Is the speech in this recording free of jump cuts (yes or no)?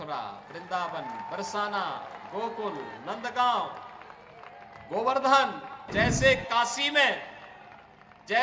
no